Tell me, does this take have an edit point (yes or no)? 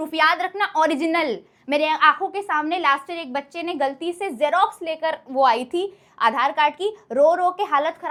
no